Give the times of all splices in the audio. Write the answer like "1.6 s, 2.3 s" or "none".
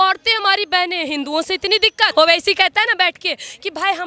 2.1 s